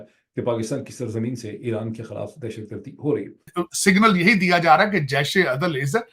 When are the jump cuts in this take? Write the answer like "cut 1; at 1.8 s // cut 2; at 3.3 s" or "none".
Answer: cut 1; at 3.4 s